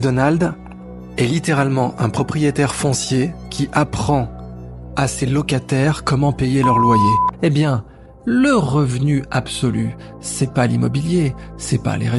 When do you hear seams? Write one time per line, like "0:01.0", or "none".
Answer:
0:07.3